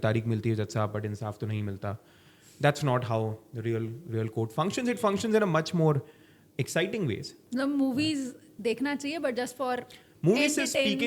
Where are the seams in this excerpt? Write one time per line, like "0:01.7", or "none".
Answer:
0:07.4